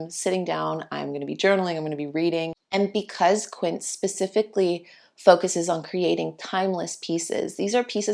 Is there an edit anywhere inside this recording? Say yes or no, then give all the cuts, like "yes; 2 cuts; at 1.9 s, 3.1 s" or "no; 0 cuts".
yes; 1 cut; at 2.6 s